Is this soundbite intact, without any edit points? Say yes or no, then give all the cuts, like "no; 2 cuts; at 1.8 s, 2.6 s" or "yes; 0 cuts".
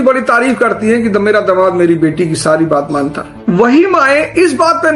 yes; 0 cuts